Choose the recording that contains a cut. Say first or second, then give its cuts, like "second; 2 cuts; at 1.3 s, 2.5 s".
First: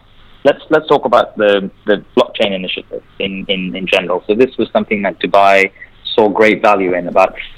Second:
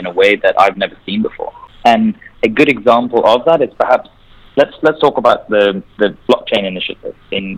second; 1 cut; at 1.6 s